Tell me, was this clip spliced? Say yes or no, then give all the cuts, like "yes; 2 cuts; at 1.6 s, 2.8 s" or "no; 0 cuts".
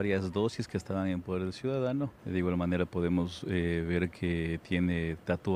yes; 1 cut; at 2.2 s